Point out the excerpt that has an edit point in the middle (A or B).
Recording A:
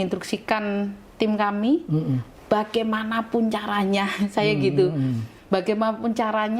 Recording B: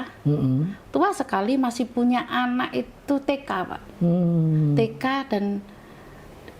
A